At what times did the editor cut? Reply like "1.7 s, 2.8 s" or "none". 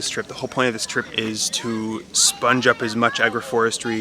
1.1 s